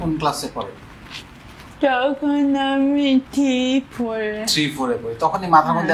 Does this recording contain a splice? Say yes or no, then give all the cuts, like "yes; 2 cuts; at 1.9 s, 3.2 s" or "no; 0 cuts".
no; 0 cuts